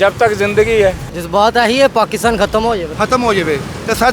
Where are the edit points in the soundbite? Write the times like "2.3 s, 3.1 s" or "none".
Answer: 1.1 s, 2.9 s